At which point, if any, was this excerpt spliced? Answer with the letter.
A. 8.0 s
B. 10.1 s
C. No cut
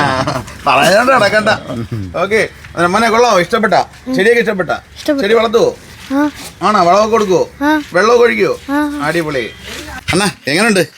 B